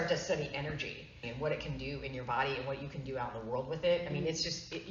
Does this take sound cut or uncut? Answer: cut